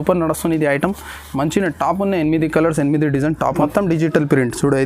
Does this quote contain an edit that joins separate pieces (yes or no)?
yes